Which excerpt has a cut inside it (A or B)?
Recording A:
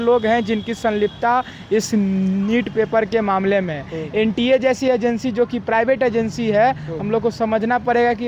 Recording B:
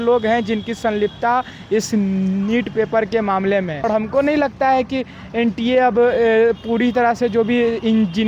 B